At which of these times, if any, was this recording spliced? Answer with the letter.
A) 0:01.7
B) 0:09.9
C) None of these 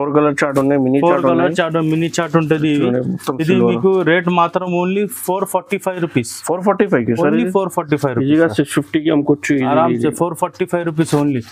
C